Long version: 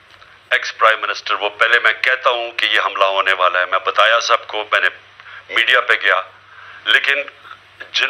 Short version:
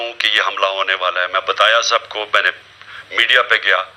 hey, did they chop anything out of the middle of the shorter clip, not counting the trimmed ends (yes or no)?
no